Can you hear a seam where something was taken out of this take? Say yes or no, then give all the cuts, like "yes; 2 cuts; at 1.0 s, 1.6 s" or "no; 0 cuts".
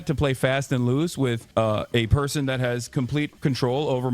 yes; 2 cuts; at 1.4 s, 3.3 s